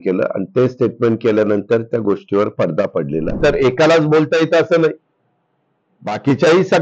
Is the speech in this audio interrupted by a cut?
yes; 1 cut; at 3.4 s

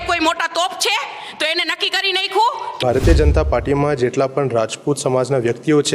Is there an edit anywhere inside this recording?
yes; 1 cut; at 2.8 s

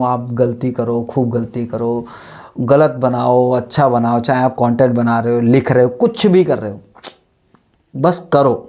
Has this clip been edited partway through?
no; 0 cuts

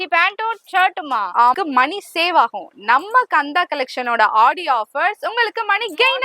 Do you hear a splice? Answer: yes; 1 cut; at 1.6 s

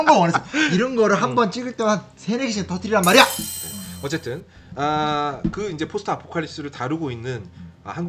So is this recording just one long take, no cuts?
yes; 0 cuts

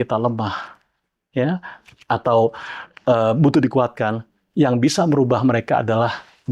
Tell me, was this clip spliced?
no; 0 cuts

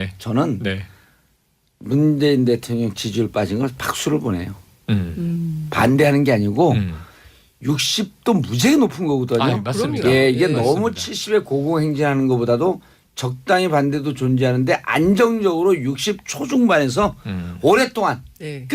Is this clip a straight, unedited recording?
no; 1 cut; at 3.7 s

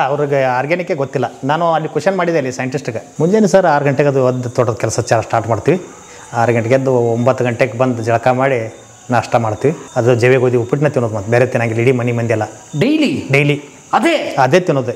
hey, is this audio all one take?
no; 2 cuts; at 3.0 s, 9.8 s

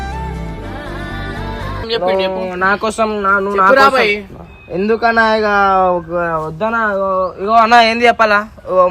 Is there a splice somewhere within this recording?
yes; 1 cut; at 1.9 s

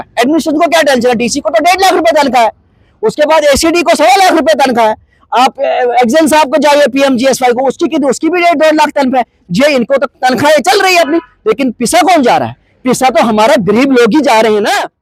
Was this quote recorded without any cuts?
yes; 0 cuts

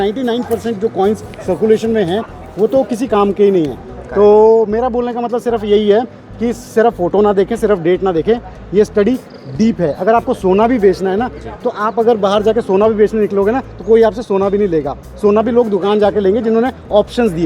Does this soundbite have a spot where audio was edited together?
no; 0 cuts

